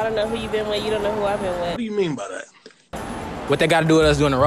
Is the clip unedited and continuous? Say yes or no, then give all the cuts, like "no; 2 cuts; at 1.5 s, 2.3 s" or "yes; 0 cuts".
yes; 0 cuts